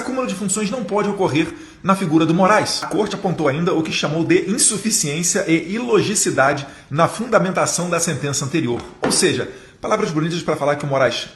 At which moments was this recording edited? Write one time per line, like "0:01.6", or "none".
0:02.8